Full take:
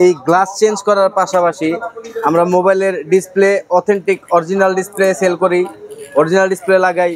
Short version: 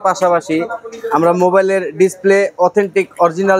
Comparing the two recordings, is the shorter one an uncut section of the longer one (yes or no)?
yes